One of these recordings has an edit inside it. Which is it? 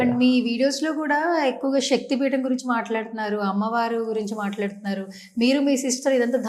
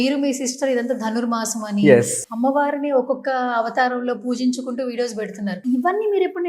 second; 2 cuts; at 2.2 s, 5.6 s

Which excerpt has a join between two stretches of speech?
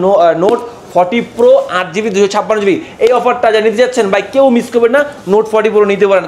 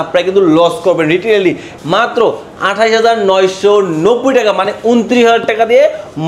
second; 1 cut; at 1.7 s

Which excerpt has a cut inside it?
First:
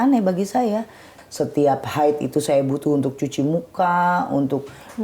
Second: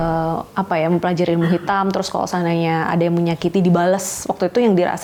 first; 1 cut; at 1.1 s

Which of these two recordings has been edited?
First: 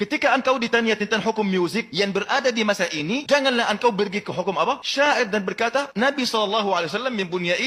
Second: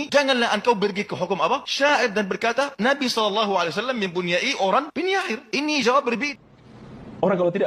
second; 1 cut; at 6.3 s

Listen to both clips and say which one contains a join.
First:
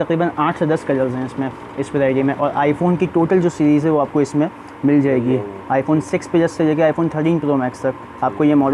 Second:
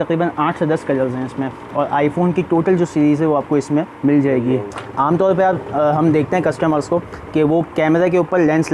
second; 3 cuts; at 1.7 s, 3.9 s, 4.7 s

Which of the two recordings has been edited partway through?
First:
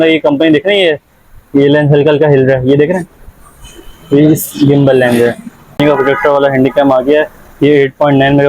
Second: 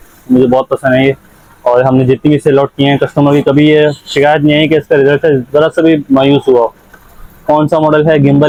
first; 1 cut; at 5.8 s

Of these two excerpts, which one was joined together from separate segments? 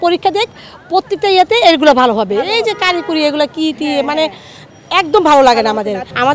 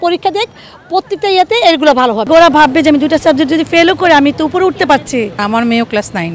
second; 2 cuts; at 2.2 s, 5.3 s

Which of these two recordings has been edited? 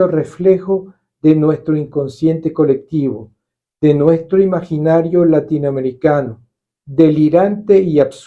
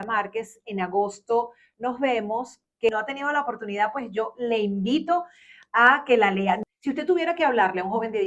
second; 2 cuts; at 2.9 s, 6.6 s

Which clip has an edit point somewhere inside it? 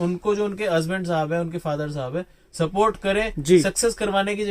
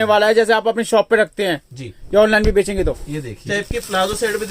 second; 1 cut; at 3.5 s

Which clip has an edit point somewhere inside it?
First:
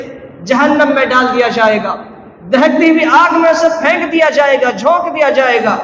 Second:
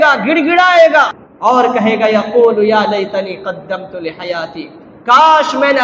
second; 1 cut; at 1.2 s

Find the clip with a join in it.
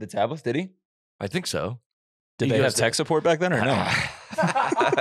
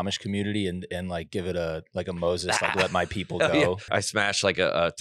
second; 1 cut; at 3.9 s

